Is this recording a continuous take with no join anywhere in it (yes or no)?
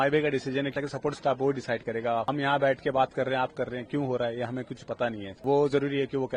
no